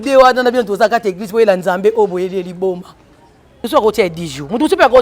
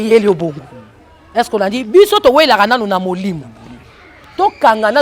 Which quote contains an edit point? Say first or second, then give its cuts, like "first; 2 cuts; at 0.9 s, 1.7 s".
first; 1 cut; at 3.7 s